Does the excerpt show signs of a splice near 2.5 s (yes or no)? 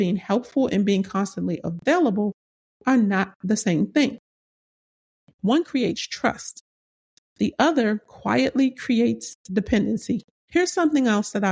no